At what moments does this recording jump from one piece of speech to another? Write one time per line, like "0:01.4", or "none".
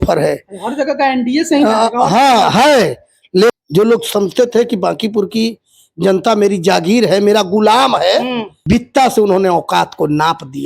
0:03.5
0:08.5